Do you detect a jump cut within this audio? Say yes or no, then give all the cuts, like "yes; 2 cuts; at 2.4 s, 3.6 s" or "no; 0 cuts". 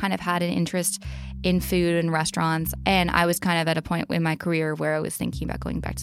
yes; 1 cut; at 2.7 s